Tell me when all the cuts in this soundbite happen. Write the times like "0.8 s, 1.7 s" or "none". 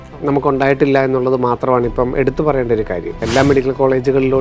3.2 s